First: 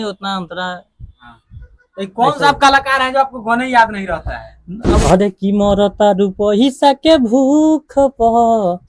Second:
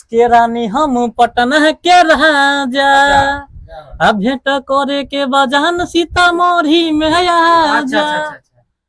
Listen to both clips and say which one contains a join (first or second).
first